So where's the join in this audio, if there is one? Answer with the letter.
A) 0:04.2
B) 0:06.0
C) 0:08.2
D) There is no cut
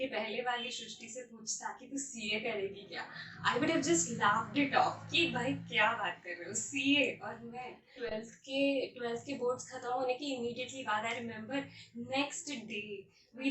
C